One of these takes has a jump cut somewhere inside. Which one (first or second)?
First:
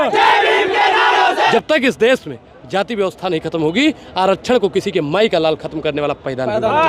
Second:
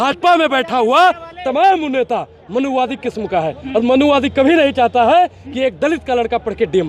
first